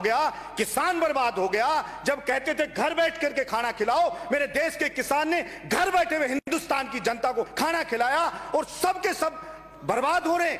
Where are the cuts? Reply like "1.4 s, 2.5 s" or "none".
none